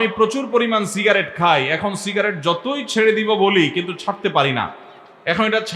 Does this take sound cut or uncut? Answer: uncut